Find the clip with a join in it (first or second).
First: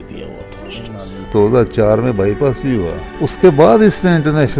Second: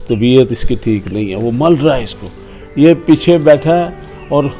first